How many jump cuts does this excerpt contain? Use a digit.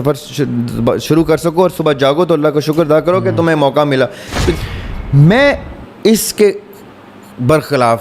1